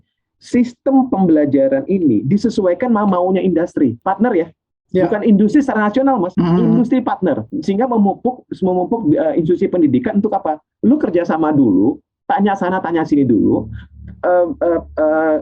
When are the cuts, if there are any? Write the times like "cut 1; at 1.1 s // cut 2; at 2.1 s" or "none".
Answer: cut 1; at 4.0 s // cut 2; at 6.3 s // cut 3; at 7.5 s